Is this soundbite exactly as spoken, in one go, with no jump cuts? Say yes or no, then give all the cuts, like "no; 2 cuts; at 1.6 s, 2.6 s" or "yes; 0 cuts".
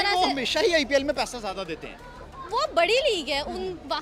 yes; 0 cuts